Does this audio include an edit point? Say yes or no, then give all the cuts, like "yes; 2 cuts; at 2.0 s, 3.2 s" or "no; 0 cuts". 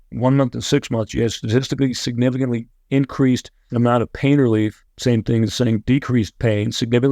yes; 2 cuts; at 3.6 s, 4.9 s